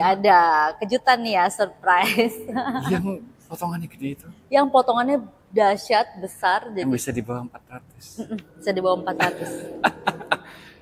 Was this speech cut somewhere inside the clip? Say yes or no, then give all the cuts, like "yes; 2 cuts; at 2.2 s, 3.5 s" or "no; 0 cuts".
no; 0 cuts